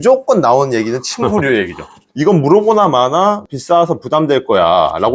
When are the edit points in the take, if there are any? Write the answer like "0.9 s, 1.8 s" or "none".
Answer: 2.0 s, 3.5 s